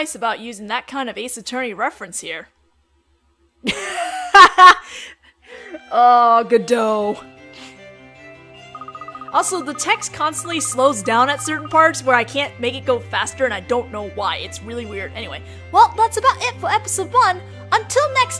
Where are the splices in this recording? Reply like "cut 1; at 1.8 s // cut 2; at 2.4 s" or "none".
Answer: none